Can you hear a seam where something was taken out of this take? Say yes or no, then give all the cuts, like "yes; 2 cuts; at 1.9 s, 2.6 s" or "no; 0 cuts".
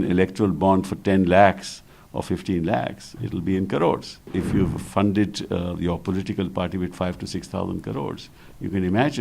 yes; 1 cut; at 4.3 s